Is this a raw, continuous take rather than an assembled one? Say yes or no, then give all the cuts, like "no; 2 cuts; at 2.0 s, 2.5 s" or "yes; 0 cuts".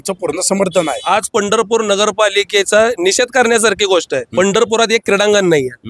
no; 2 cuts; at 1.0 s, 4.2 s